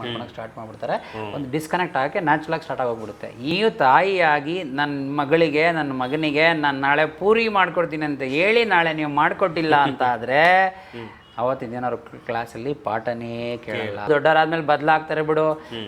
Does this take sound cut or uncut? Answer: cut